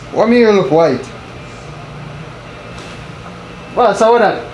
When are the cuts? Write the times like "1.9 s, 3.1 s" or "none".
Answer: none